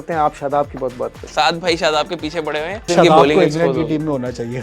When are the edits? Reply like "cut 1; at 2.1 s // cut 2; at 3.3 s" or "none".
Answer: cut 1; at 1.3 s // cut 2; at 2.9 s